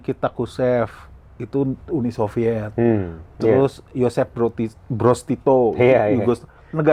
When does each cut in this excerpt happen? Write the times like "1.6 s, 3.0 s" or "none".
none